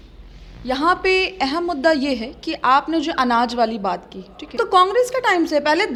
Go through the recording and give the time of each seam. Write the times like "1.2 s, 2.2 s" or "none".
none

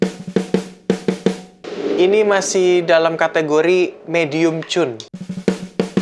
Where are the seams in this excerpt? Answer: none

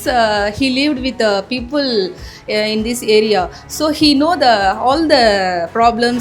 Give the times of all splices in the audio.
none

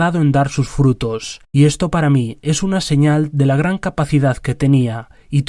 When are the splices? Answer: 3.0 s

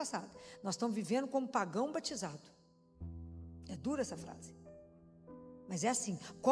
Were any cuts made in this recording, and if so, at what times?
4.3 s, 5.7 s

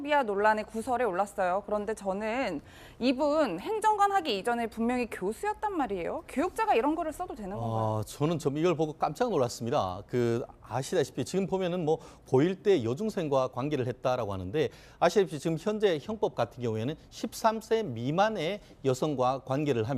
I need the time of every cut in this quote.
6.5 s

